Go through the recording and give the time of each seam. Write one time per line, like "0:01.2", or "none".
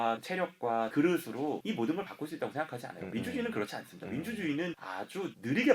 none